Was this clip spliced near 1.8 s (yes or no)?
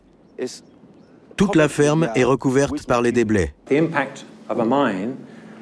no